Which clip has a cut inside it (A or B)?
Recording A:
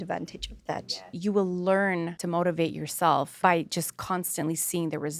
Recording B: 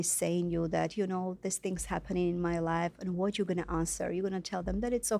A